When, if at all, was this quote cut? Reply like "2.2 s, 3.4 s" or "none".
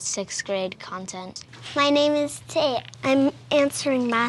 1.4 s